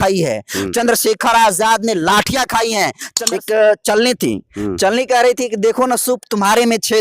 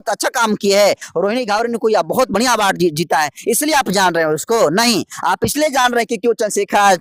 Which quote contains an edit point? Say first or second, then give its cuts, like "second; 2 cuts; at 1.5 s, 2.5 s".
first; 1 cut; at 3.1 s